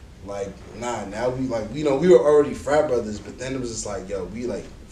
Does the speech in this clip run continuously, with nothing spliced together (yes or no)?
yes